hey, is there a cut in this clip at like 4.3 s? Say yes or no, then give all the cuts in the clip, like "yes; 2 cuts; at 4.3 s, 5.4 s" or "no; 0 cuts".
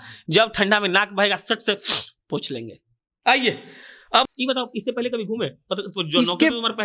yes; 1 cut; at 4.3 s